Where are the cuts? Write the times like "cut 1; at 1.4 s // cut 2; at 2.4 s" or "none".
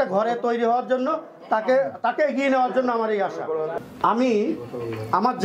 cut 1; at 3.8 s